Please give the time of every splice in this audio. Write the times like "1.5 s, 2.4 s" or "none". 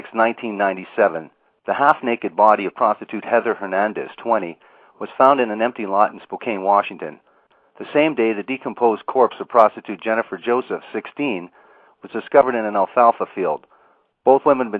none